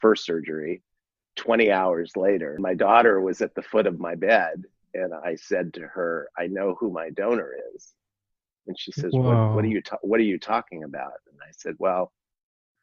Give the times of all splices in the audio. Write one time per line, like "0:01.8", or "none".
0:02.6